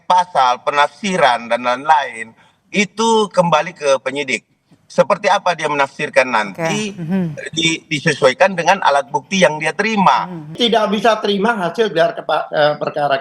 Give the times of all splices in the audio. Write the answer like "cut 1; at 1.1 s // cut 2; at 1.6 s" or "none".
cut 1; at 10.5 s